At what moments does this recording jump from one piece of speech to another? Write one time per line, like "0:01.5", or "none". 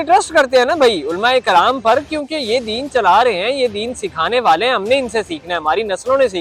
none

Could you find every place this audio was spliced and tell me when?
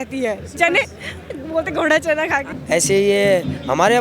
0:02.5

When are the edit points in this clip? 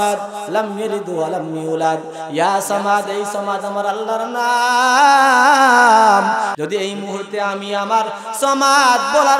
0:06.5

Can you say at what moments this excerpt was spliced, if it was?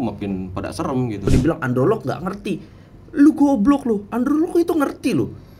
0:01.3

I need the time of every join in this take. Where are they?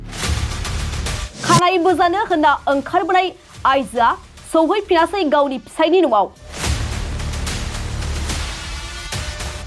none

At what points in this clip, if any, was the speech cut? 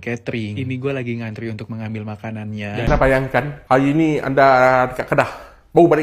0:02.8

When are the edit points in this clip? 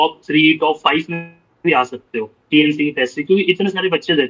none

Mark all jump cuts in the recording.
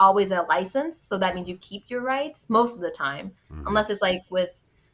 none

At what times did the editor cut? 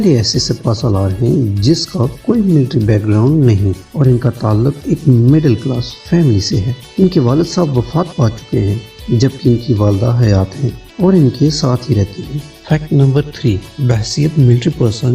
none

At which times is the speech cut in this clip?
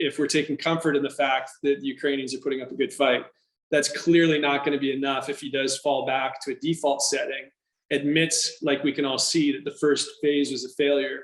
none

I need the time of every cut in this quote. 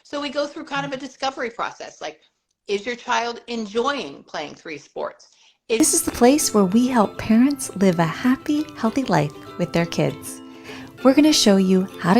0:05.8

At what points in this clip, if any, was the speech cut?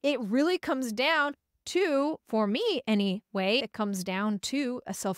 0:03.6

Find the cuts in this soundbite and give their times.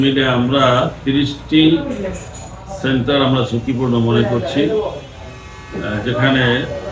none

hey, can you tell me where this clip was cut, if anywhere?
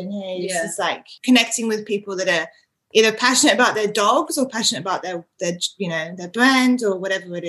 0:01.1

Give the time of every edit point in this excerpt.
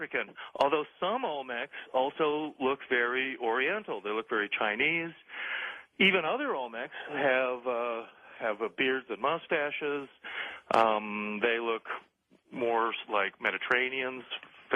0:02.4

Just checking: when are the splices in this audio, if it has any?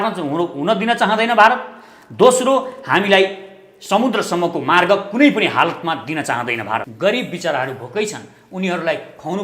0:06.9

